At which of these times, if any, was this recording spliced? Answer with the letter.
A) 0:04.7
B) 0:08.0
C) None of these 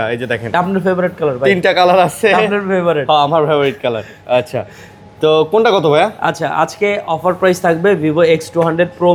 C